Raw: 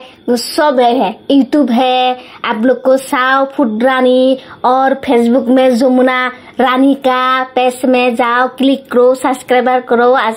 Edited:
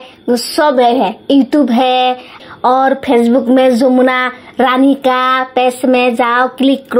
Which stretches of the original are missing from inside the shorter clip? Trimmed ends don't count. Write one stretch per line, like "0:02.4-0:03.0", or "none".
0:02.5-0:04.5